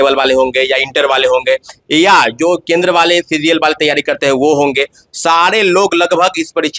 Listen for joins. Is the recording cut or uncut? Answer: uncut